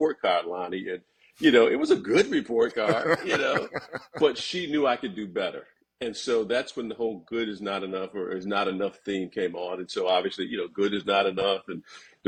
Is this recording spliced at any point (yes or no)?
no